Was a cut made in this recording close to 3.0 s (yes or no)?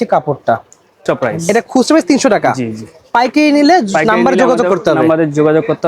no